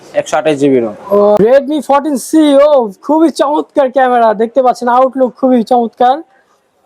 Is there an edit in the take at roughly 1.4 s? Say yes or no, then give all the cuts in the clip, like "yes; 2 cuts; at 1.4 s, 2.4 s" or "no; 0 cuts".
yes; 1 cut; at 1.4 s